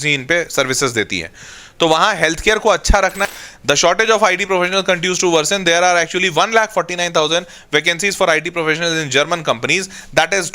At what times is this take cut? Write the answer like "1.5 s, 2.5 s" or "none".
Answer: 3.2 s

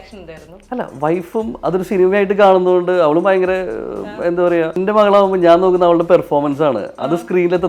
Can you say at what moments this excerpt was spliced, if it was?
4.8 s

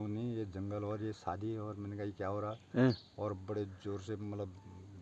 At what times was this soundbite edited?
none

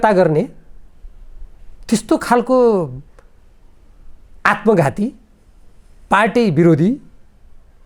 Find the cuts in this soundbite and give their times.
none

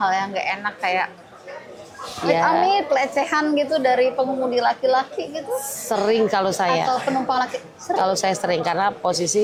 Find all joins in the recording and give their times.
none

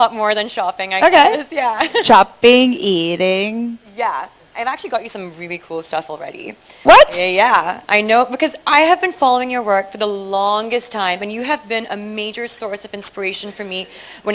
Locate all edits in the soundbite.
none

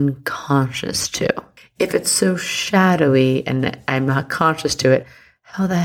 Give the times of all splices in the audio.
1.5 s

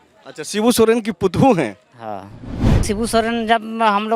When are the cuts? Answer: 2.8 s

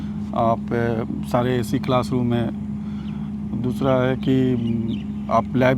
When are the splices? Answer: none

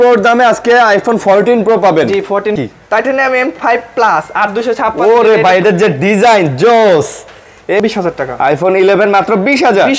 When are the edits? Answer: 2.6 s, 7.8 s

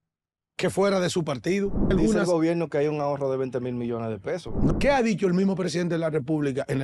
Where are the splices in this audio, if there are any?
1.9 s, 4.7 s

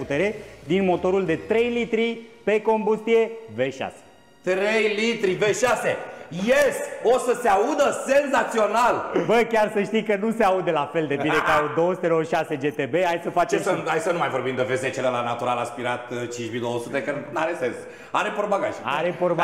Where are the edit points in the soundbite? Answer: none

